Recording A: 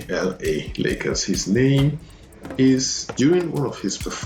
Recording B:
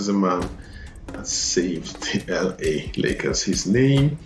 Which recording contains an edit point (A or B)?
A